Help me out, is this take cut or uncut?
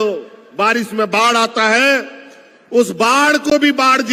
uncut